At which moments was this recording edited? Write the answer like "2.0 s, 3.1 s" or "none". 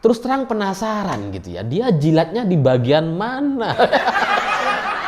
4.2 s